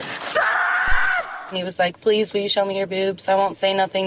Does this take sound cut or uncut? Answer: cut